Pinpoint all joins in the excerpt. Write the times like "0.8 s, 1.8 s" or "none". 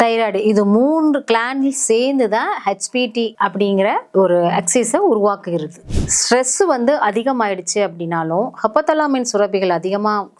5.8 s